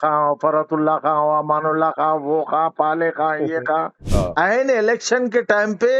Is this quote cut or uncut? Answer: cut